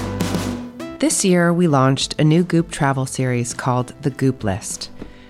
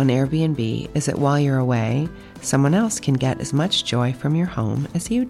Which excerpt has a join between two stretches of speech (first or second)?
first